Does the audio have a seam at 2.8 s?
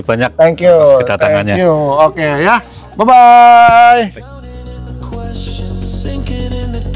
no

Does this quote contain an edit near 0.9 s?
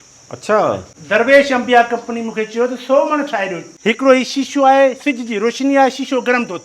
yes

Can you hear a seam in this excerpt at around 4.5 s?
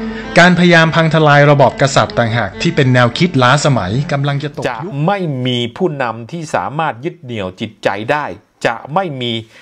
yes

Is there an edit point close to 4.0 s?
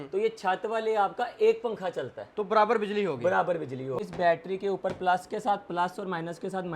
yes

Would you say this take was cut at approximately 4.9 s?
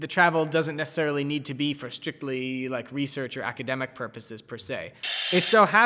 yes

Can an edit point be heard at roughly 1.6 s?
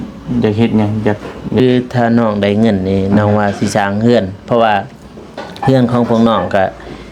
yes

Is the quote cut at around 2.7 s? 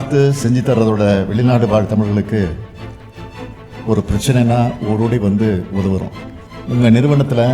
no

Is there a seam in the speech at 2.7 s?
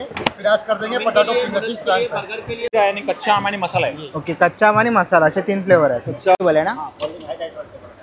yes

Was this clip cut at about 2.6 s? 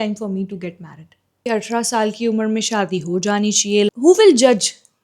no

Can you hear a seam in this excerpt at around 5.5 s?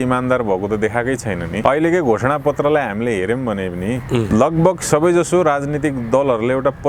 no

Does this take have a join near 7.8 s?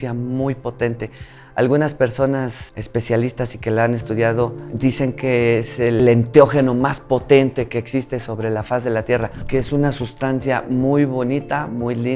no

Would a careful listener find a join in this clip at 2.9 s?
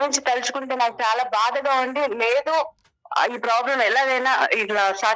no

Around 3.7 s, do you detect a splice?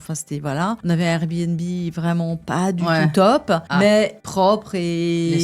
yes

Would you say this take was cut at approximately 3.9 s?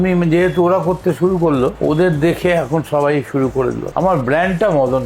yes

